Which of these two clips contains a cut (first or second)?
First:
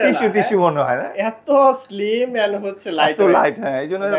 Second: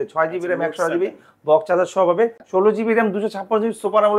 second